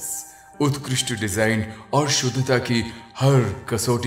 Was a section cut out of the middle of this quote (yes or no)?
no